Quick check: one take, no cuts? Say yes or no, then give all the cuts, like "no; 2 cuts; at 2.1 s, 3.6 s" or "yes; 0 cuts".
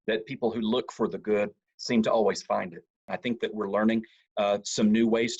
no; 1 cut; at 3.1 s